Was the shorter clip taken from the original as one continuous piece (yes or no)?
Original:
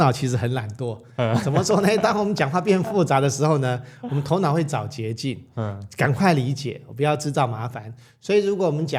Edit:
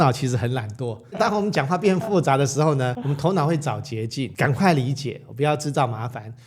no